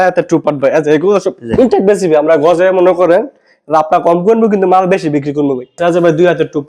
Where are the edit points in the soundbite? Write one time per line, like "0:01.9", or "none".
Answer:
0:05.7